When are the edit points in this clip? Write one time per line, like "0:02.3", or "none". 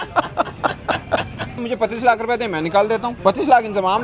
0:01.7
0:03.1